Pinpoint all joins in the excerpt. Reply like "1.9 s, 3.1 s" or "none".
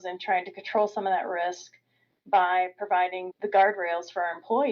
3.2 s